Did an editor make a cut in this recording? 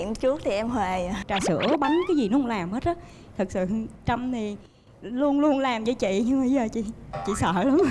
yes; 1 cut; at 1.2 s

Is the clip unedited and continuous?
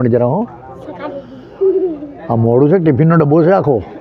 yes; 0 cuts

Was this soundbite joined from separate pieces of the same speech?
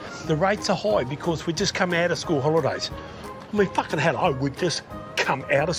no; 0 cuts

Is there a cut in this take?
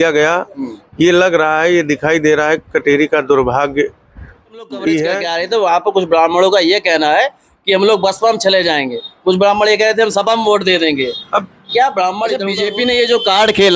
yes; 2 cuts; at 5.3 s, 12.5 s

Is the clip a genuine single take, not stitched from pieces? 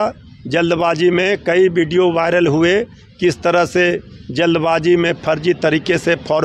yes; 0 cuts

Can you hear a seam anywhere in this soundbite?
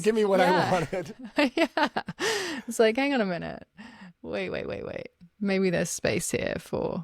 no; 0 cuts

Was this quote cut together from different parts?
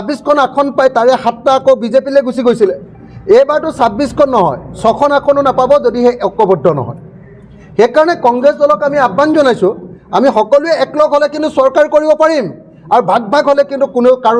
no; 0 cuts

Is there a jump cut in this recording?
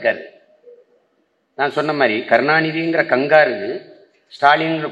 no; 0 cuts

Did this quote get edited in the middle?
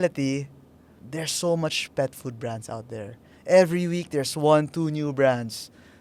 yes; 1 cut; at 1.0 s

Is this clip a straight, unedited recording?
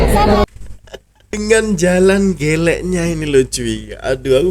no; 1 cut; at 1.4 s

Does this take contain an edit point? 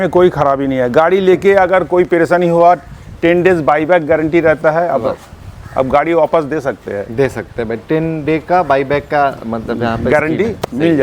no; 0 cuts

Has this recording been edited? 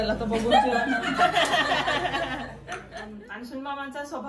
yes; 1 cut; at 2.8 s

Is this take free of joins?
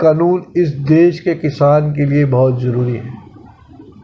yes; 0 cuts

